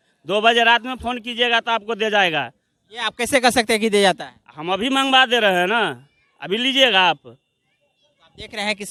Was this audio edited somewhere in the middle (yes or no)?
no